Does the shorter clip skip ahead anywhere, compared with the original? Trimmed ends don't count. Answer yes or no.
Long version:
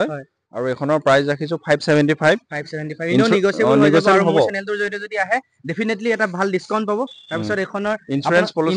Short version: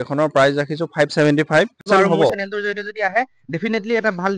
yes